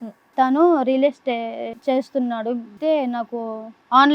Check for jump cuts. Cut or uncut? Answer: cut